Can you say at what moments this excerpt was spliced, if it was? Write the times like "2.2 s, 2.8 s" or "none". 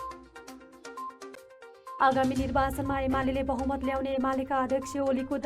1.9 s